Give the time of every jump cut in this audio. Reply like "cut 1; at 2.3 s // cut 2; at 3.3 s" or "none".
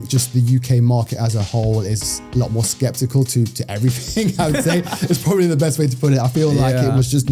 none